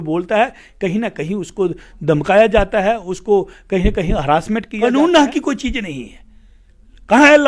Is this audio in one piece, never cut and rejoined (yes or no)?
no